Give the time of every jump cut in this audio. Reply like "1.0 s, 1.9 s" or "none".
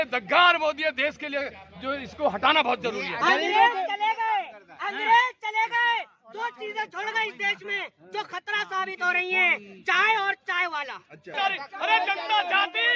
11.3 s